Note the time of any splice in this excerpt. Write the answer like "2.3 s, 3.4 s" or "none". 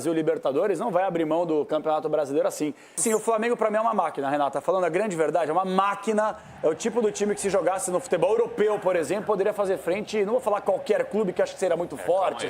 3.0 s